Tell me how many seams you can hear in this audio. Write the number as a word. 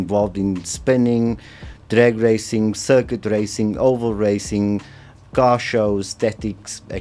zero